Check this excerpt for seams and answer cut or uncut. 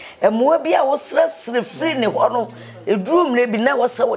uncut